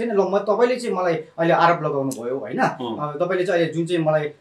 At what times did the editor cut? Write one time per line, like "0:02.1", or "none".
none